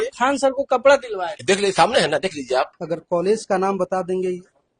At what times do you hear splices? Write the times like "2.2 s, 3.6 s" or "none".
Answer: 2.8 s